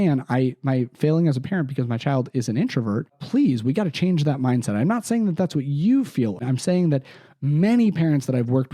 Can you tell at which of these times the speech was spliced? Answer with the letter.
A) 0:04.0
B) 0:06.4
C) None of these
B